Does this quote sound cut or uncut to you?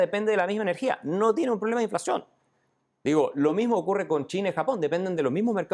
uncut